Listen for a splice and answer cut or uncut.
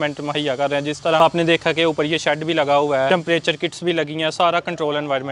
cut